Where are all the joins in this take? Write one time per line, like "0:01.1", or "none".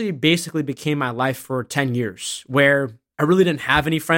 0:03.0